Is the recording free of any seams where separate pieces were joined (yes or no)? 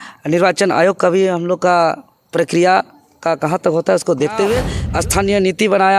no